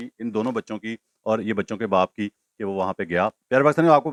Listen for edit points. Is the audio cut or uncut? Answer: uncut